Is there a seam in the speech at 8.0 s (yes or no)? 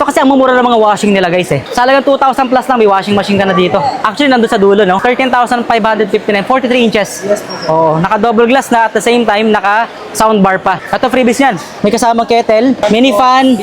no